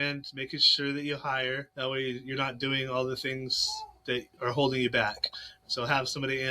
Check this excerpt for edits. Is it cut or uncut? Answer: cut